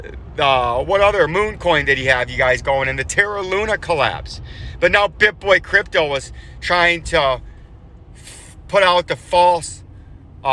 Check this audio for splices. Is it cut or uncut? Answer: uncut